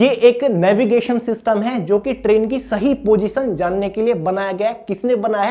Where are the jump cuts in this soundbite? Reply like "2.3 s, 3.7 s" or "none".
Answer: none